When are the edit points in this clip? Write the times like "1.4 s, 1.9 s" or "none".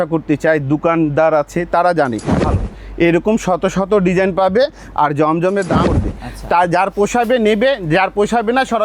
2.4 s, 5.9 s